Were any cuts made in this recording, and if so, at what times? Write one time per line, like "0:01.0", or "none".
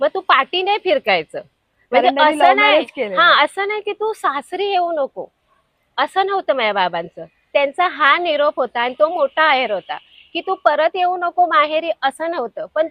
none